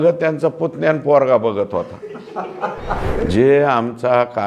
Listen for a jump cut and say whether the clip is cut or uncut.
cut